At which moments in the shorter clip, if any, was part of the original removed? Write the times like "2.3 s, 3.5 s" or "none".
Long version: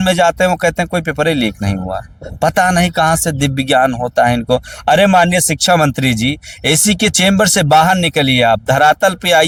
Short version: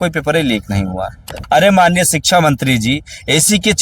1.4 s